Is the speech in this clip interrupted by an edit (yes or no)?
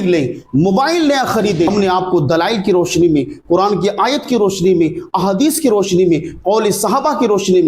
yes